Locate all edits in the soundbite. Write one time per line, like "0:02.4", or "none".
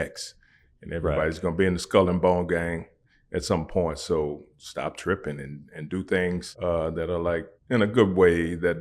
0:04.5
0:06.5
0:07.5